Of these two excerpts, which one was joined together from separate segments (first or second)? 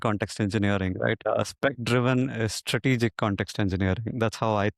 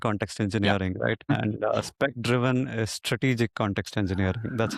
first